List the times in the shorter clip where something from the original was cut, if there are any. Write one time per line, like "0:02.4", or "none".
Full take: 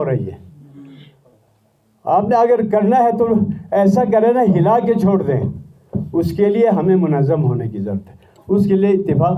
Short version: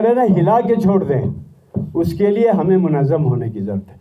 none